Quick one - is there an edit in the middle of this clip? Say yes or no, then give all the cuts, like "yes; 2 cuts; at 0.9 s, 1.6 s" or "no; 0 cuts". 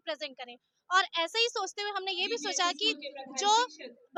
no; 0 cuts